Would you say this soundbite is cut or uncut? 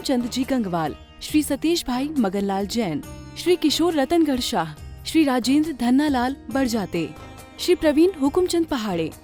uncut